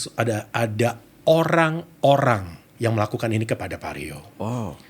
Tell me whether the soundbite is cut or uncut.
cut